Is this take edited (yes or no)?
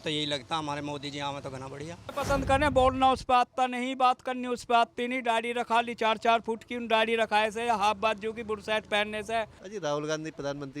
yes